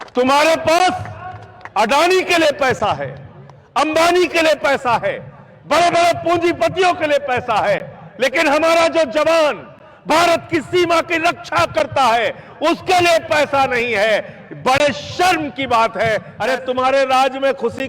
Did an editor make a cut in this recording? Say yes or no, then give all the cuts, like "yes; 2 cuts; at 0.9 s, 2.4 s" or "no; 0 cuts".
yes; 1 cut; at 16.3 s